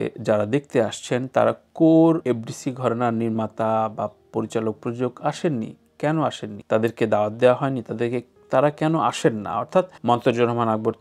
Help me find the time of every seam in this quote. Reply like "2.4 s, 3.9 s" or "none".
2.2 s, 6.5 s, 9.9 s